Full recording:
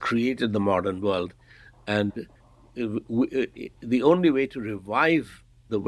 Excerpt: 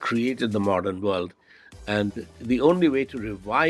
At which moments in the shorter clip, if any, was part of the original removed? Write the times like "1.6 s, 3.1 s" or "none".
2.3 s